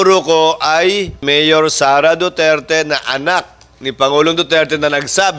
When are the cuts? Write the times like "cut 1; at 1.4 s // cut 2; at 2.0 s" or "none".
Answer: cut 1; at 1.2 s